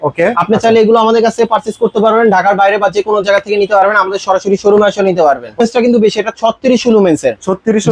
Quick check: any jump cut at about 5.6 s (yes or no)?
yes